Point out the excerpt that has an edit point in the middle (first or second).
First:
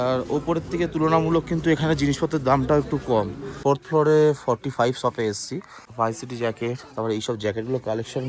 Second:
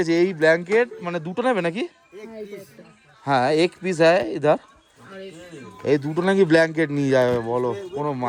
first